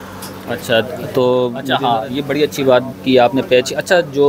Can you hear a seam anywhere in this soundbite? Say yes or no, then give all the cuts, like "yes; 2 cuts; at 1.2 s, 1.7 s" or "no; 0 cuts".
yes; 1 cut; at 1.6 s